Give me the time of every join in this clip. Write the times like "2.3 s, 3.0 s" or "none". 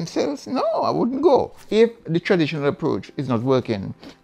1.6 s